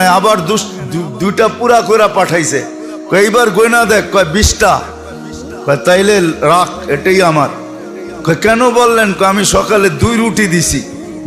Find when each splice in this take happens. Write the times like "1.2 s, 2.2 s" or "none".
none